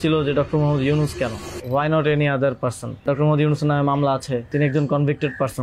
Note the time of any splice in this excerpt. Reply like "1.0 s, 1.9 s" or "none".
1.5 s, 3.0 s, 4.5 s